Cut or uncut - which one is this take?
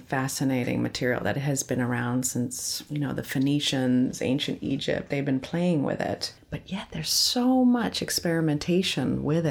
uncut